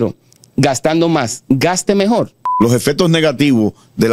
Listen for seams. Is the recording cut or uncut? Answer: cut